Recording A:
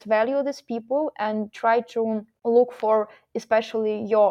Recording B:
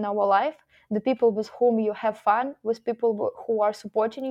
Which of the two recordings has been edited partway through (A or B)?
A